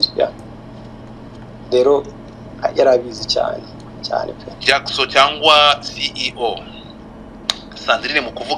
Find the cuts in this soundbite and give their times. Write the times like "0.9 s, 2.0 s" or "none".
4.5 s